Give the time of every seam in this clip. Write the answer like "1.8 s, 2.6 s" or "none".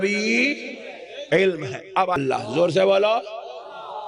2.2 s

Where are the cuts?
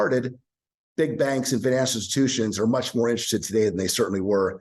none

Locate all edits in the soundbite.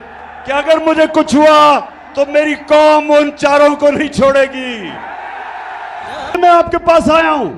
6.4 s

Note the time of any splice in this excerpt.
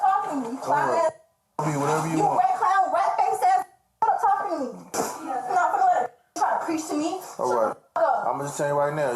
4.8 s

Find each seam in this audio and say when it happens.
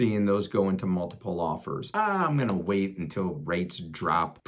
1.9 s

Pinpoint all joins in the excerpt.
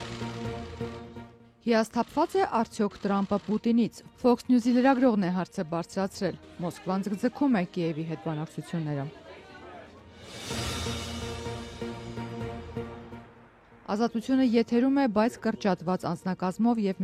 1.5 s

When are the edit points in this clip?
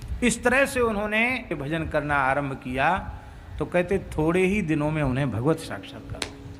1.5 s

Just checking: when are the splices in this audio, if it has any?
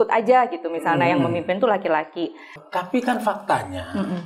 2.6 s

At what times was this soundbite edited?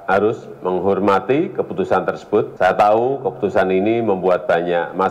2.5 s

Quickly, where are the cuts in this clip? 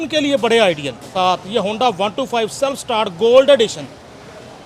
1.1 s

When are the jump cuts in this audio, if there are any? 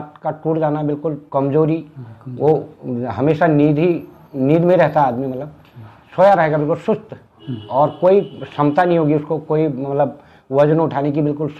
none

